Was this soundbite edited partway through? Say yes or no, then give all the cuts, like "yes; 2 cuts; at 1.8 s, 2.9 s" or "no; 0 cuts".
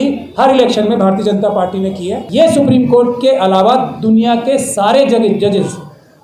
yes; 1 cut; at 2.2 s